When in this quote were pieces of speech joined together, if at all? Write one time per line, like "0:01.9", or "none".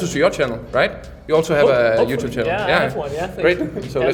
none